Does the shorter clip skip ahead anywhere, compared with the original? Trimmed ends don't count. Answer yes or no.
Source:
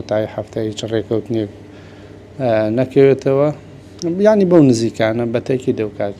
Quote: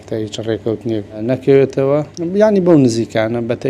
yes